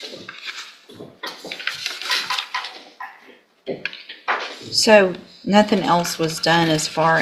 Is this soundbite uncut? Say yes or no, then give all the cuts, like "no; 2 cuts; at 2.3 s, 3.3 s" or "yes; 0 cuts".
yes; 0 cuts